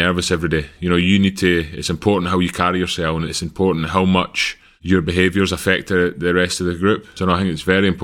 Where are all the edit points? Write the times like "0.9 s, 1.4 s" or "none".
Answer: 7.1 s